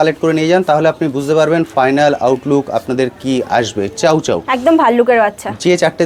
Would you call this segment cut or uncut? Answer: uncut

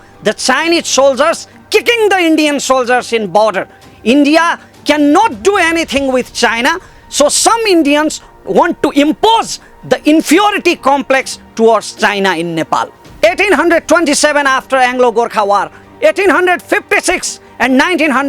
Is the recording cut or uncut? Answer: cut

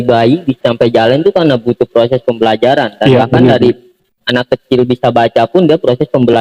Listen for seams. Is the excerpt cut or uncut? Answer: uncut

